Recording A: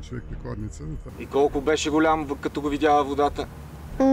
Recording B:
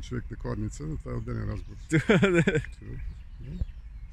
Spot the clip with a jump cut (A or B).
A